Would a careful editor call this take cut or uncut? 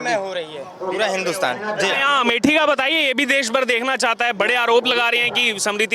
uncut